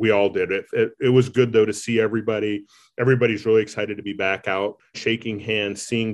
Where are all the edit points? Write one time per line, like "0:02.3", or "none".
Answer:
0:05.0